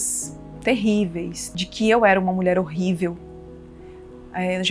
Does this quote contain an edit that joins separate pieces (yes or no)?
no